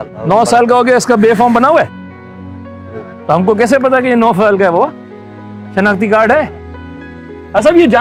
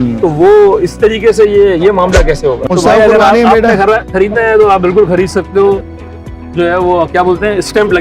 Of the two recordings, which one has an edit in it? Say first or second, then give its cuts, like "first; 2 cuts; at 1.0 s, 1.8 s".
second; 1 cut; at 2.6 s